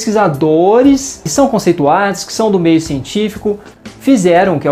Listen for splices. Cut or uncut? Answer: cut